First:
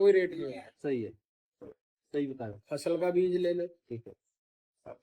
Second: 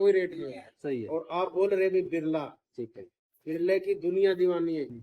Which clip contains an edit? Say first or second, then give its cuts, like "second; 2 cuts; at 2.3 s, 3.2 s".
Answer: second; 1 cut; at 1.0 s